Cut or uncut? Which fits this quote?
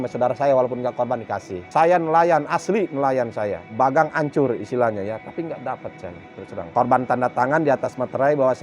cut